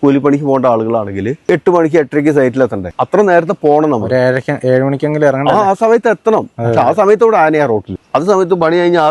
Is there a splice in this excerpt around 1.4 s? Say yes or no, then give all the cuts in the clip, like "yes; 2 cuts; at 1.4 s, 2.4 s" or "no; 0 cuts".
yes; 3 cuts; at 1.4 s, 2.9 s, 7.9 s